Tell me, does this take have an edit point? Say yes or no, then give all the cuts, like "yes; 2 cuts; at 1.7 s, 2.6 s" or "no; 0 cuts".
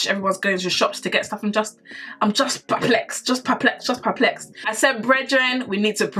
yes; 1 cut; at 4.6 s